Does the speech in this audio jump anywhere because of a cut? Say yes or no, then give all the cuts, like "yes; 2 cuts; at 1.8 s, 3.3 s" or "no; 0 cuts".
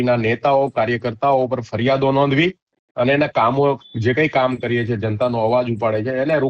no; 0 cuts